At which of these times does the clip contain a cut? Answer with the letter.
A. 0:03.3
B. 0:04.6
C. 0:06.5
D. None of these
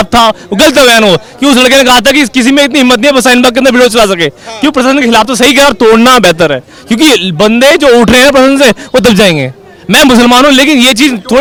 D